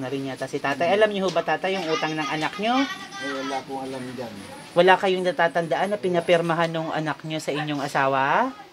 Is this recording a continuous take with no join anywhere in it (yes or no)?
yes